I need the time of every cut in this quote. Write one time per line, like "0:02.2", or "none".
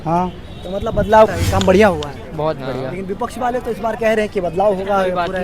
0:01.3